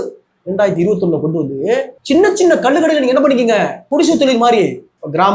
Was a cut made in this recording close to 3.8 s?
yes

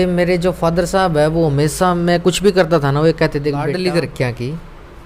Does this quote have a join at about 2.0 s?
no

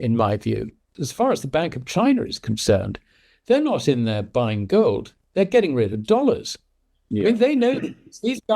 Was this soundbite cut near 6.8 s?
no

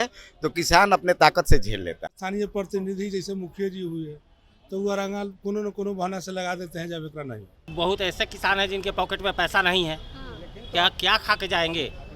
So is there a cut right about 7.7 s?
yes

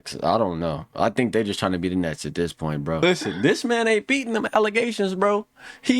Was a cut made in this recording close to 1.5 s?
no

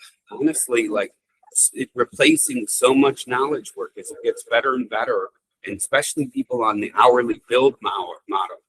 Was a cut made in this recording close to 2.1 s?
no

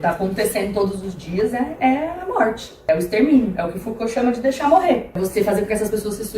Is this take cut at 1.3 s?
no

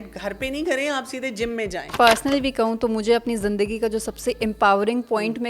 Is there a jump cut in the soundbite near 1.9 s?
yes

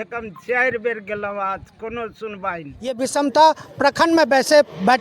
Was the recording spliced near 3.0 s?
yes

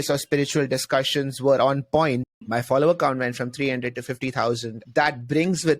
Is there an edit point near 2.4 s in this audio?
yes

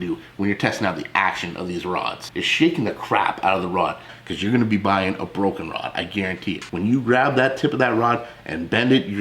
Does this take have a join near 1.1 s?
no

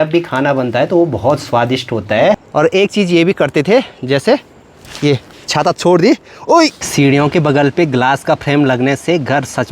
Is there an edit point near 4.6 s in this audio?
no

